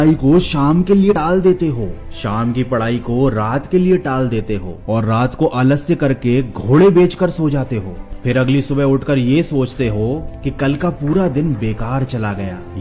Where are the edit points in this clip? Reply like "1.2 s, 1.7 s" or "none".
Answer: 1.1 s